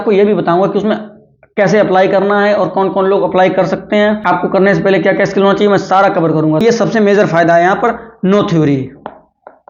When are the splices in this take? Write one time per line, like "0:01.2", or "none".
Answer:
0:04.2
0:06.6